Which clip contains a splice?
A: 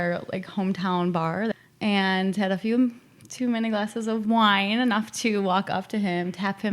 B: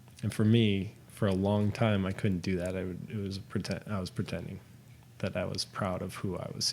A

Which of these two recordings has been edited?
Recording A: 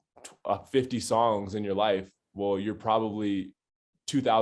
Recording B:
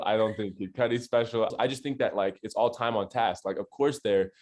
B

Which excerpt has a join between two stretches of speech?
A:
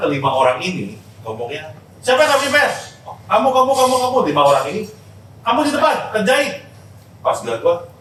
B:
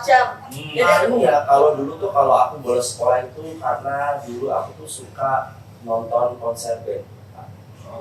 B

